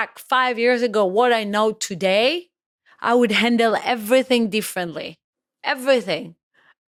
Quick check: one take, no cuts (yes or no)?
yes